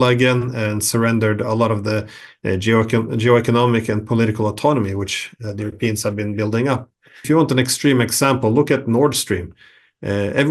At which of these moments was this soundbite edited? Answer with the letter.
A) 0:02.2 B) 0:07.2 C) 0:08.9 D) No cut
B